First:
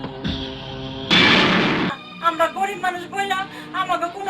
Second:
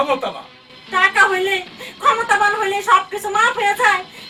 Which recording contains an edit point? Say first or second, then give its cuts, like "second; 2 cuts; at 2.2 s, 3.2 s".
first; 1 cut; at 1.9 s